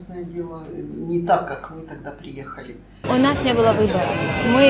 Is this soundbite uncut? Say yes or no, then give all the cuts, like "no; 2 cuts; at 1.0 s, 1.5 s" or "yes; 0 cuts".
no; 1 cut; at 3.0 s